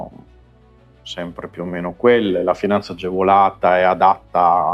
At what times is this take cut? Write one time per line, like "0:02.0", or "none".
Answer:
none